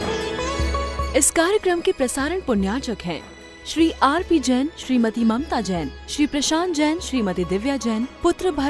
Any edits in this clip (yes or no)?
yes